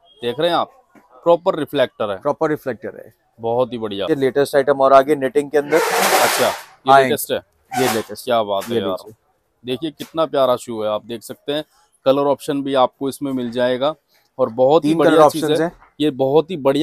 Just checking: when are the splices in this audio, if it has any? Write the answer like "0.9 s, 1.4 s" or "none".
4.0 s

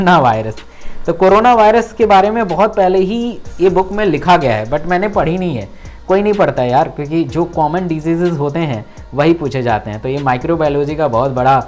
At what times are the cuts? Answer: none

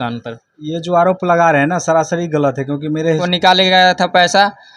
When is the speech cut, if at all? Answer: 3.3 s

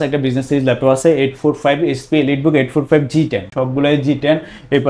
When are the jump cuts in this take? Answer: 3.5 s

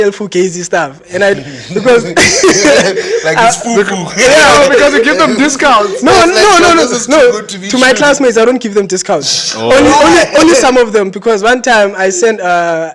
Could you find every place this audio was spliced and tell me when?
none

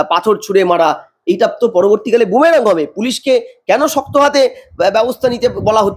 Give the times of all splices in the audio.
none

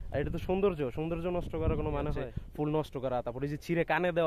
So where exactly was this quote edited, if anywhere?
2.2 s

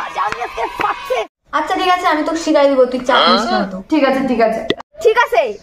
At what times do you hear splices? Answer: 1.3 s, 4.7 s

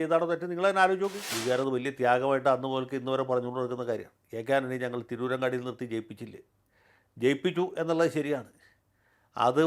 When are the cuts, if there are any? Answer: 1.3 s

